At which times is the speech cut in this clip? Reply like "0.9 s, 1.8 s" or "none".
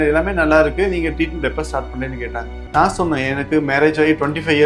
2.6 s

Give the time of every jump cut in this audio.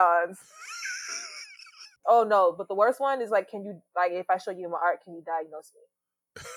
2.0 s

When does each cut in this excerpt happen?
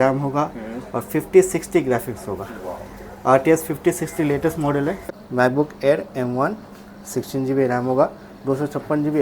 5.0 s

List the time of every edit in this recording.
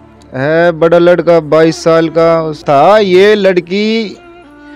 2.6 s

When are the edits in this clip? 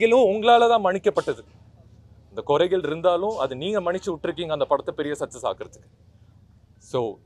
none

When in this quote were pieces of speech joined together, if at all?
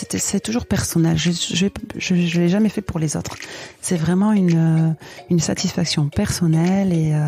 none

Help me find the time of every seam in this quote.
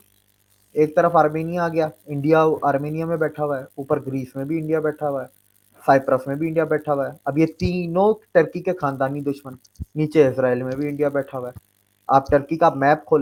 none

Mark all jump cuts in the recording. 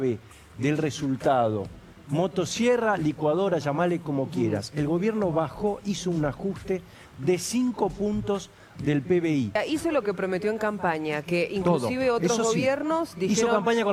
9.6 s

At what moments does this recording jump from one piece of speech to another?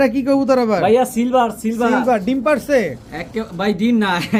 none

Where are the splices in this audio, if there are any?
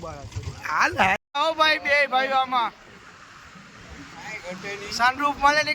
1.2 s

